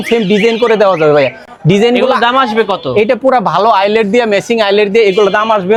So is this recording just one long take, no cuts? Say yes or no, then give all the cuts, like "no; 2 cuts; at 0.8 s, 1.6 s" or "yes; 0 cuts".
yes; 0 cuts